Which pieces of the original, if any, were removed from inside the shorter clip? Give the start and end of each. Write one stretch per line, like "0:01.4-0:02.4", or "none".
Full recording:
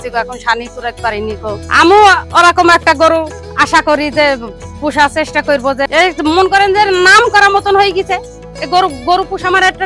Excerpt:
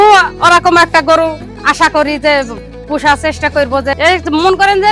none